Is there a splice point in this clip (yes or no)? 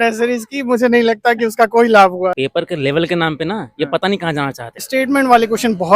yes